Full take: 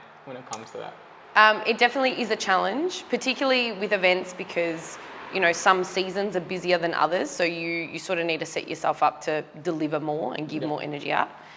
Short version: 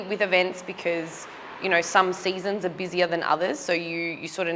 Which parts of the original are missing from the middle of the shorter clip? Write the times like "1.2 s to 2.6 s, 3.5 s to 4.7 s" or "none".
none